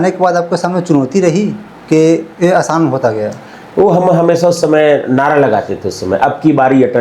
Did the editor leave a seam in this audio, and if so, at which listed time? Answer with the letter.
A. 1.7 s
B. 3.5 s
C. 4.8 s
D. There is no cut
B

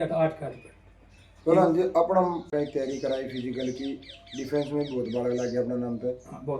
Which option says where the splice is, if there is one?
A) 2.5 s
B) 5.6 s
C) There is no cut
A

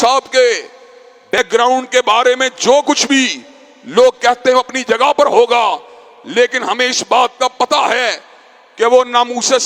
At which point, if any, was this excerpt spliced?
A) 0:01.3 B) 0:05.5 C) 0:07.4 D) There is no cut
A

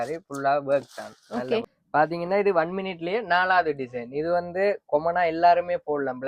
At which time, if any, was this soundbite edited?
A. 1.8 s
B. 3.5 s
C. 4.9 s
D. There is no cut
A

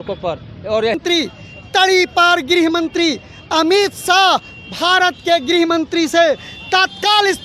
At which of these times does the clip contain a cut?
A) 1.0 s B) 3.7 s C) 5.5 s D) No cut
A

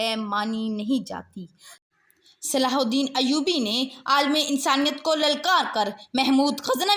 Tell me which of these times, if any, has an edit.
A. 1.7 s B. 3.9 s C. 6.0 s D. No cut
A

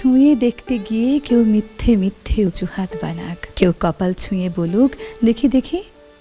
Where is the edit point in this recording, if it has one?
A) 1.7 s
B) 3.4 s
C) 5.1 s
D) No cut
B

